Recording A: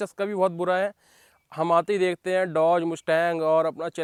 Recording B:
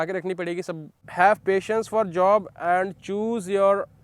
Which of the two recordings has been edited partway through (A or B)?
B